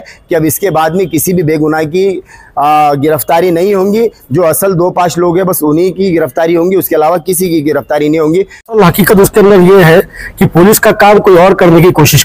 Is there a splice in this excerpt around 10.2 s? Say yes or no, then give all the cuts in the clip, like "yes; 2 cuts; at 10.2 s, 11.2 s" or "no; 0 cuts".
no; 1 cut; at 8.8 s